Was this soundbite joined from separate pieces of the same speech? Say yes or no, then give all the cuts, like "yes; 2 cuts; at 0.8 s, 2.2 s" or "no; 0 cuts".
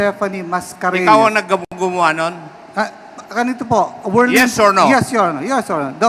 no; 0 cuts